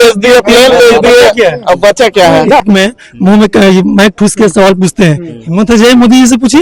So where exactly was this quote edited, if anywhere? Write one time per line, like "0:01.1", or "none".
0:02.6